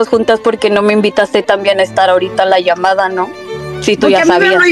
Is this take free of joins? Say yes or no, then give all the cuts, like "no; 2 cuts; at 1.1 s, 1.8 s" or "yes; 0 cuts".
no; 1 cut; at 3.4 s